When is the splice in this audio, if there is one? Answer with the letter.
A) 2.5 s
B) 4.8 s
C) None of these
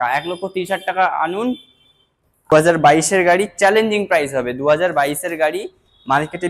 A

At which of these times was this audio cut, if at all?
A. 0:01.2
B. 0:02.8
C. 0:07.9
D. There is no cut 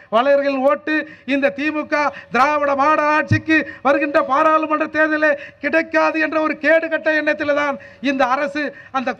D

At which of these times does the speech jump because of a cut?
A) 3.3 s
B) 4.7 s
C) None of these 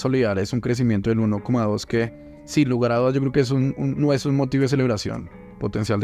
C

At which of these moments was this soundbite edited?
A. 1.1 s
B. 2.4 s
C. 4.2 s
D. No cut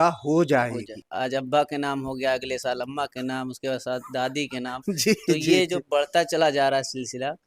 A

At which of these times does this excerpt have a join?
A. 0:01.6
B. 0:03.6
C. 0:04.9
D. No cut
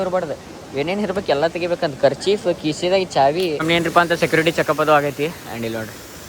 B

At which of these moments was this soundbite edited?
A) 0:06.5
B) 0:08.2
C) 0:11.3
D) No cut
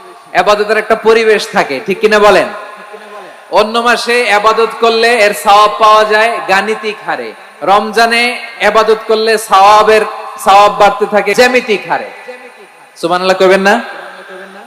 C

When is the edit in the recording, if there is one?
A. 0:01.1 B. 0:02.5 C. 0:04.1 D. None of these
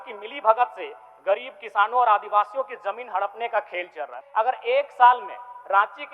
C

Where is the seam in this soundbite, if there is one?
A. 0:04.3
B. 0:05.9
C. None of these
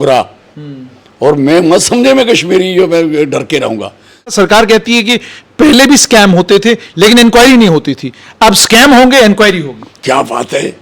A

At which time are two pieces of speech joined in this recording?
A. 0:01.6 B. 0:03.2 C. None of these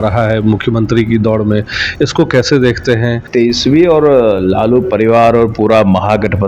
B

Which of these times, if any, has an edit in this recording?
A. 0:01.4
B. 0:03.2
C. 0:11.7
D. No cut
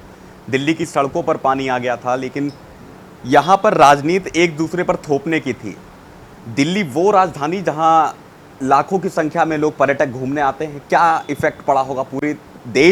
D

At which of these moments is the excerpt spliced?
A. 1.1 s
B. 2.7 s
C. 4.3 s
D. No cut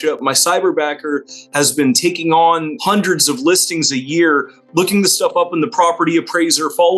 B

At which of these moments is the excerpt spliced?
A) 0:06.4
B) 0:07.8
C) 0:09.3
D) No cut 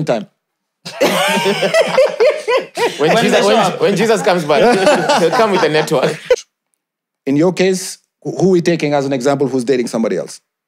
A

